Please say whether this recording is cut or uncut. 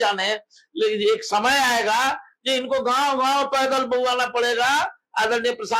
uncut